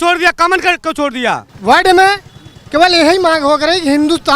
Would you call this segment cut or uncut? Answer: cut